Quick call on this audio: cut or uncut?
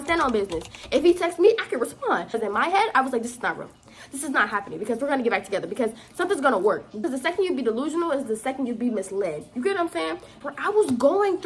cut